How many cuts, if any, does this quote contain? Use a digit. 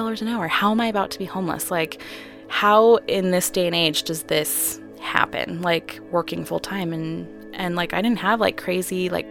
0